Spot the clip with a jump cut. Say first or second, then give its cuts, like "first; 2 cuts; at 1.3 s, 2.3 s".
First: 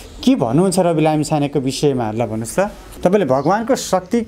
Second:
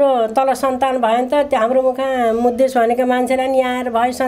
first; 1 cut; at 2.9 s